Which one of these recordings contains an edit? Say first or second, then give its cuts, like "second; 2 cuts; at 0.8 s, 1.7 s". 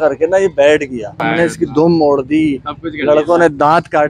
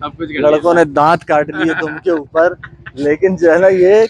first; 1 cut; at 1.2 s